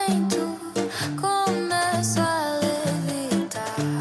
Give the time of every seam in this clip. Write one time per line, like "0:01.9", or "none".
none

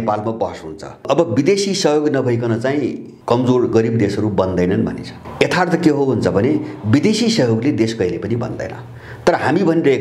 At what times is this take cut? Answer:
0:01.0
0:03.1
0:05.1

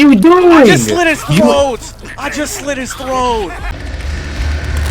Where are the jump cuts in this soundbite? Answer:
0:03.7

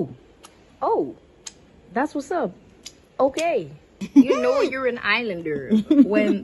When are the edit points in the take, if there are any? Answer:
0:04.0

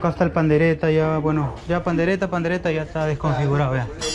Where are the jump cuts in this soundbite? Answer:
none

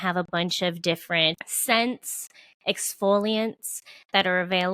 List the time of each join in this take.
0:01.5

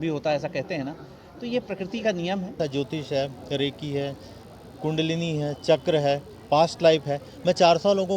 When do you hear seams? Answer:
0:02.6

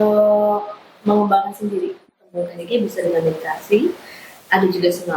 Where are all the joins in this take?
0:02.0

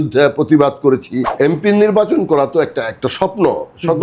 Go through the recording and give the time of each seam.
0:01.2

